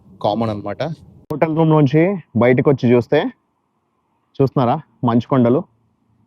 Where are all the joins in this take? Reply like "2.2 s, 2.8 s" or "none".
1.1 s